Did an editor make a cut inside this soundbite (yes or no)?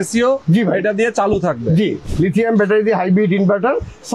yes